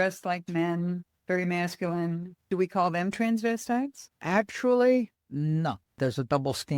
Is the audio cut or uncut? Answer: cut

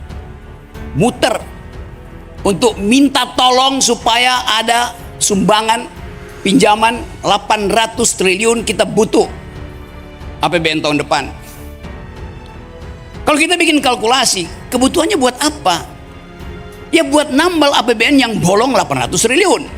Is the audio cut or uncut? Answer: uncut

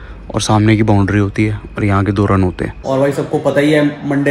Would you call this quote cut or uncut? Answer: cut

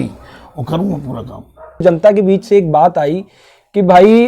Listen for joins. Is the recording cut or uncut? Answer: cut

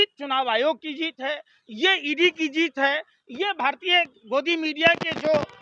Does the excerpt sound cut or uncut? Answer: uncut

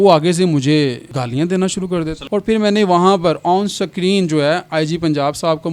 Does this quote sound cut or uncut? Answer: cut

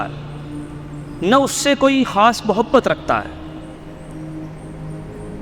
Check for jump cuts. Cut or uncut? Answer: uncut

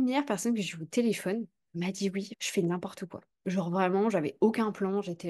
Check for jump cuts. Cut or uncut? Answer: cut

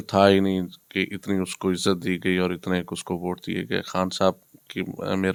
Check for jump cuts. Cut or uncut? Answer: uncut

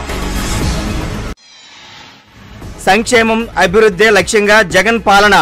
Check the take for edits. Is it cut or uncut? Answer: uncut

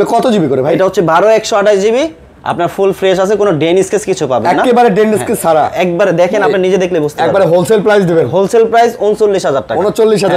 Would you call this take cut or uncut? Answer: uncut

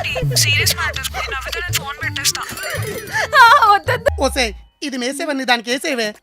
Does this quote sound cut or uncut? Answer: cut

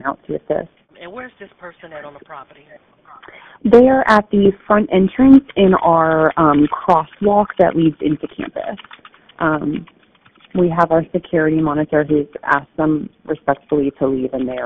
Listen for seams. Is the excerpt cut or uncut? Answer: uncut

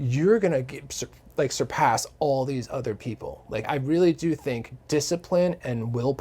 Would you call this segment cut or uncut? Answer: cut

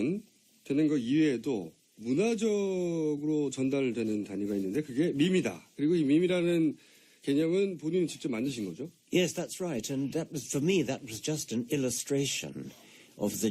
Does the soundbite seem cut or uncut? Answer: cut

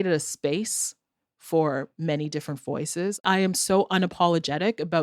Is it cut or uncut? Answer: cut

